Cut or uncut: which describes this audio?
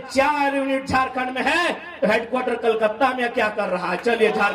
uncut